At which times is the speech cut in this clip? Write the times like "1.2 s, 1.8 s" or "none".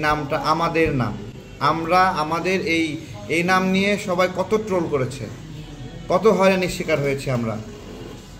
none